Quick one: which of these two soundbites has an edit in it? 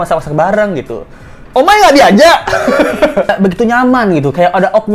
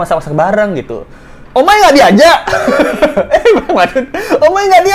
first; 1 cut; at 3.3 s

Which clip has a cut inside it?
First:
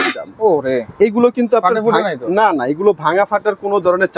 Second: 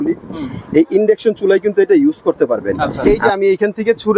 second; 1 cut; at 2.9 s

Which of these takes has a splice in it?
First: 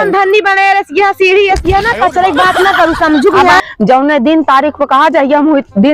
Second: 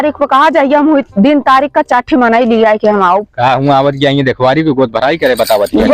first; 1 cut; at 3.6 s

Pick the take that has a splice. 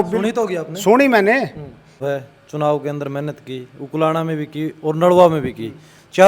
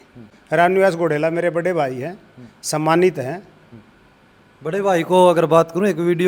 first; 1 cut; at 1.9 s

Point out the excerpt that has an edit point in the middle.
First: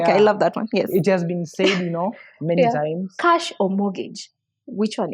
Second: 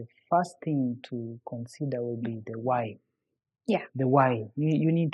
first; 1 cut; at 3.1 s

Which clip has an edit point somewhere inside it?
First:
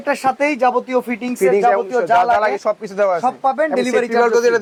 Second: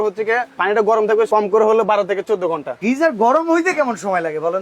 second; 2 cuts; at 1.3 s, 2.7 s

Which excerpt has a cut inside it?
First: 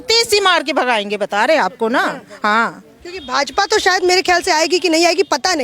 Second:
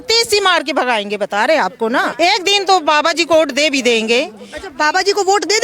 second; 1 cut; at 2.1 s

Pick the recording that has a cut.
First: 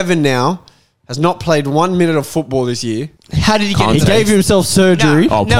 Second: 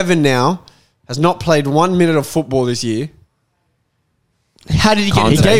first; 1 cut; at 3.2 s

